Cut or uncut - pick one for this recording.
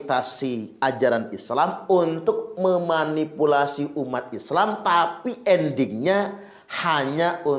uncut